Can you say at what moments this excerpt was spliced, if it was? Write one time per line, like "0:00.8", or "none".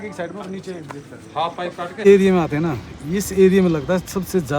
0:02.0